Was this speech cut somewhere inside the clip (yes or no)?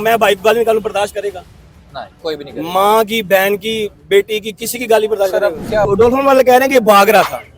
yes